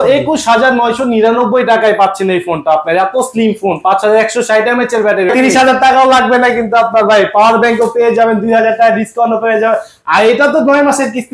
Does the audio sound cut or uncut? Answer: cut